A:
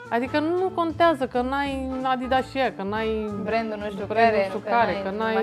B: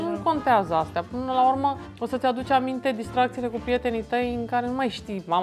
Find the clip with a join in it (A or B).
B